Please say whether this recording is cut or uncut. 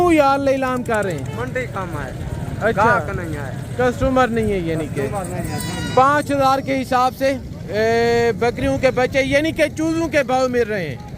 uncut